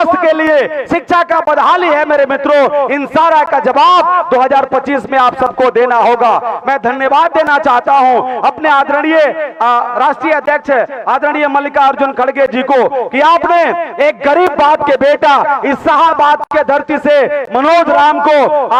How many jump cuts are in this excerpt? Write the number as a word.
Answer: zero